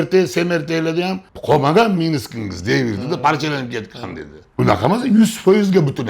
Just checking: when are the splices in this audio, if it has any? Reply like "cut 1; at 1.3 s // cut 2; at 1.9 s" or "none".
cut 1; at 1.3 s